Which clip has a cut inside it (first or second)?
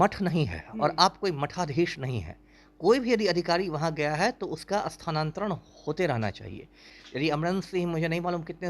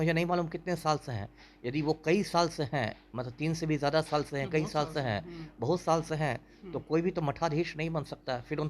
first